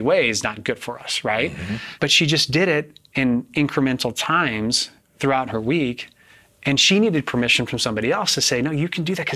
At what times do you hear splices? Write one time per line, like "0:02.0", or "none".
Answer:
0:01.9